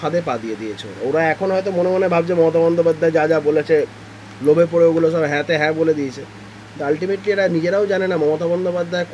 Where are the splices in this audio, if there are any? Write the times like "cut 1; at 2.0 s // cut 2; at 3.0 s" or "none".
none